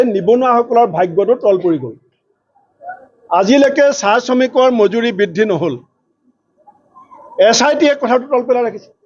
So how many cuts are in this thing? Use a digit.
0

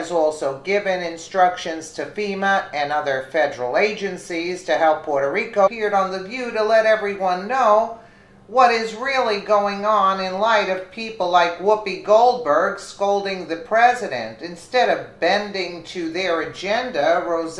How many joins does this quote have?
0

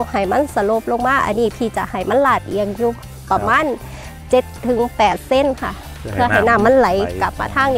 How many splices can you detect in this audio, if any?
0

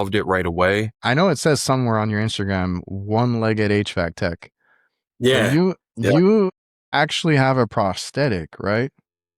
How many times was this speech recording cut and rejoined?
1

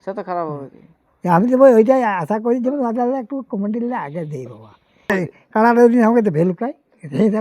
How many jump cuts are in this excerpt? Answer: 1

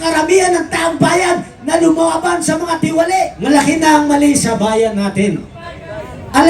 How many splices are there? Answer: 1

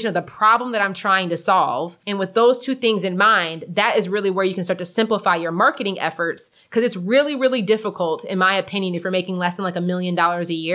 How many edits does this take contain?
1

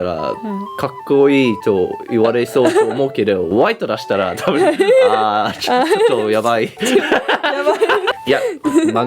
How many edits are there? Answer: 1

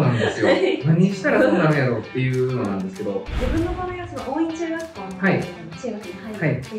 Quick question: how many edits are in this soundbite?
2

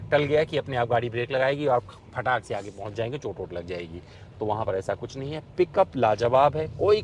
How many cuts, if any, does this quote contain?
0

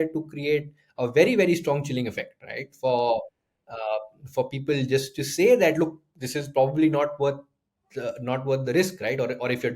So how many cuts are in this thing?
0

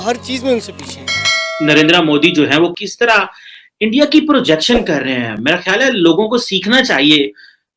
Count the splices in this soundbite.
2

